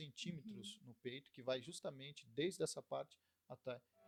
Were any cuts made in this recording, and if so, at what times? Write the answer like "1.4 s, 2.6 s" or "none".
none